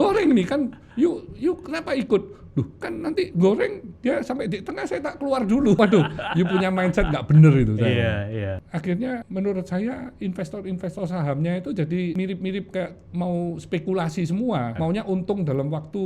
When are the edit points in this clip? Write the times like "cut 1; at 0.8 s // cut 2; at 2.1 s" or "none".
cut 1; at 5.8 s // cut 2; at 8.4 s // cut 3; at 9.3 s // cut 4; at 12.1 s // cut 5; at 14.7 s